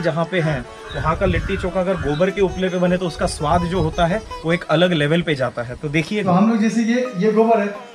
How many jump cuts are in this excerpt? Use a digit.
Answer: 1